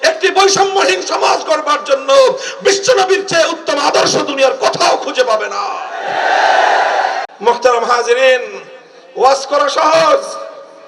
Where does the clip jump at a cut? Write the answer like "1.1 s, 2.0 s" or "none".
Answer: 7.3 s